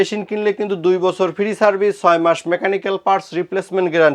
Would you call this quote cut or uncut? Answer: uncut